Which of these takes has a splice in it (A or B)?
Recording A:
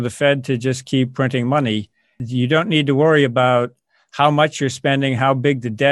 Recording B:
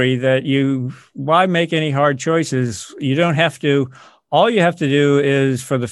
A